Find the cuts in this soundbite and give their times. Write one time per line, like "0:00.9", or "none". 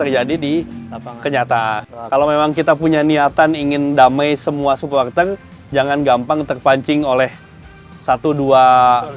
0:01.9